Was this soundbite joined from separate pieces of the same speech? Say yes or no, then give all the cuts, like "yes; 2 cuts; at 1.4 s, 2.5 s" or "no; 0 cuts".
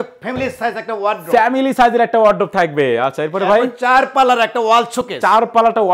no; 0 cuts